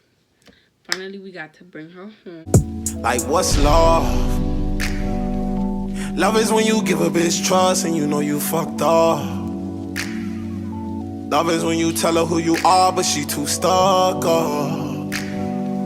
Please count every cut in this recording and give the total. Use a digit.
1